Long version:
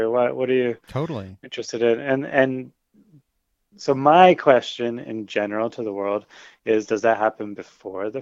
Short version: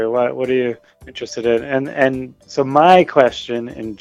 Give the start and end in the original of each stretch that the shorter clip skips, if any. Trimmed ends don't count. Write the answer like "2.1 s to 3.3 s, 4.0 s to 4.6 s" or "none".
0.9 s to 1.3 s, 2.7 s to 3.7 s